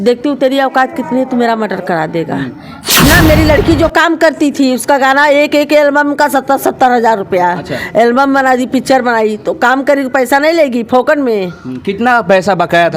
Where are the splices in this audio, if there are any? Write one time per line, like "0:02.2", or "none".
0:02.9